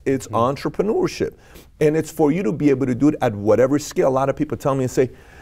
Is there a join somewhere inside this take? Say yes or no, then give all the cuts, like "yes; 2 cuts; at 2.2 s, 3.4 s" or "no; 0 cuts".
no; 0 cuts